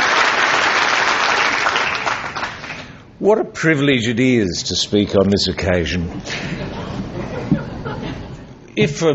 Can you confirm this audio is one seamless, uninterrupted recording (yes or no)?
yes